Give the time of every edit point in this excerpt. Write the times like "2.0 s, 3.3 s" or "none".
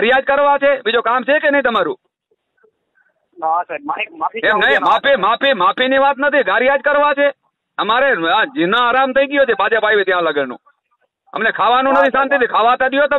none